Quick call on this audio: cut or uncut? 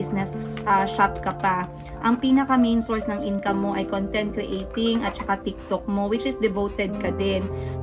uncut